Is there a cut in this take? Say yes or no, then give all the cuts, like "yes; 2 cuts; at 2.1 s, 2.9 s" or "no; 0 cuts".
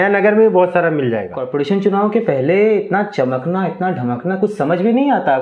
yes; 1 cut; at 1.4 s